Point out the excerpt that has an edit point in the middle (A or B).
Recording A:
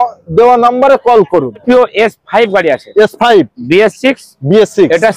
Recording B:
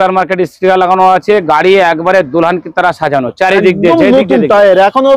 A